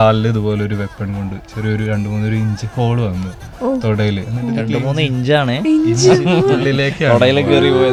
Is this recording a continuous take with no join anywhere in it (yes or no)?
yes